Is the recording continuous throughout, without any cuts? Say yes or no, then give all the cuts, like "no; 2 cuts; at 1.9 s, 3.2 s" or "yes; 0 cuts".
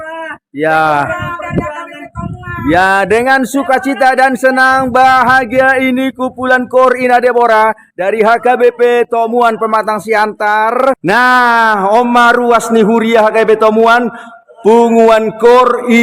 no; 1 cut; at 11.0 s